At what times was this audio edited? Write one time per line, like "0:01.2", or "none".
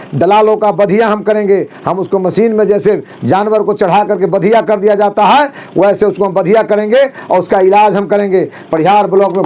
none